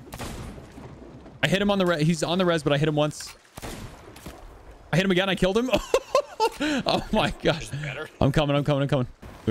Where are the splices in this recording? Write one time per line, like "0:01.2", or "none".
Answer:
none